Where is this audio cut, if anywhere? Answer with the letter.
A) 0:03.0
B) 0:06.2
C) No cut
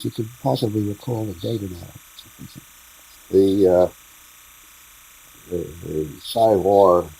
B